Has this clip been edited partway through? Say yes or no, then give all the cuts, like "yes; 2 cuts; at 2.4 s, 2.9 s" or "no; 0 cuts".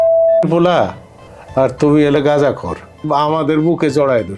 yes; 1 cut; at 3.0 s